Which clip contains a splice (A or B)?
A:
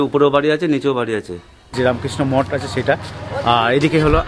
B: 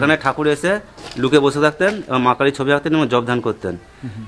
A